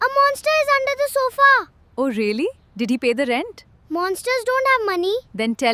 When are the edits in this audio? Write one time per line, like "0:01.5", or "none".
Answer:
none